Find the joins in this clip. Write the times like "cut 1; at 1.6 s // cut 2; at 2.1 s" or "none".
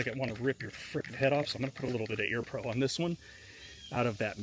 none